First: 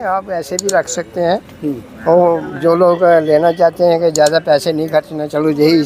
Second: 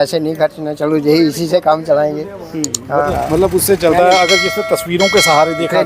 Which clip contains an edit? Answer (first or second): second